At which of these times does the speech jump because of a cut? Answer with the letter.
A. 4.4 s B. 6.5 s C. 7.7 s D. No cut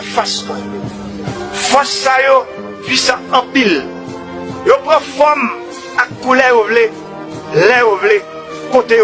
C